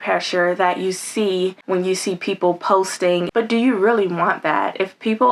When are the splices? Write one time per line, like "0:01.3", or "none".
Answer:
0:01.6
0:03.3

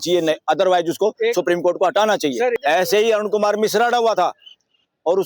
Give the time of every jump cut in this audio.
0:02.6

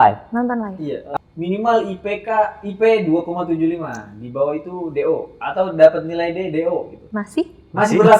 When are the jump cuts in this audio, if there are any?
0:01.0
0:07.0

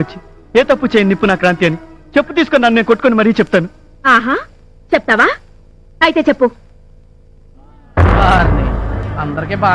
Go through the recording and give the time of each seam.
none

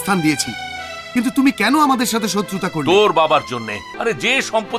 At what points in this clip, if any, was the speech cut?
0:03.8

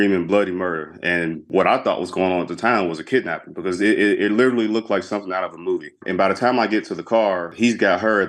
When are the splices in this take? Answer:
0:01.5
0:06.0
0:07.5

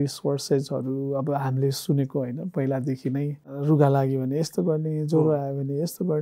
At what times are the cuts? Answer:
0:03.6

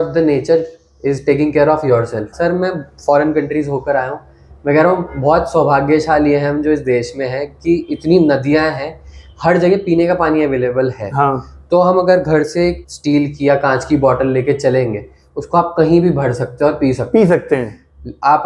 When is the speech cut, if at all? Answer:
none

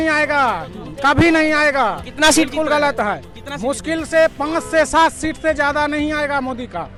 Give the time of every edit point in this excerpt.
none

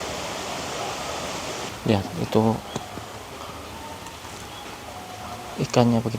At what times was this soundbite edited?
0:01.7

